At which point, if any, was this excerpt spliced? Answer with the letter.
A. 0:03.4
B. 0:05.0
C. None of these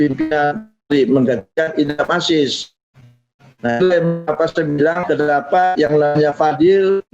B